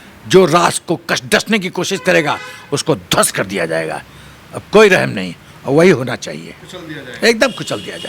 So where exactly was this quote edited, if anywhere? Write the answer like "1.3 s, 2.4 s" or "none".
none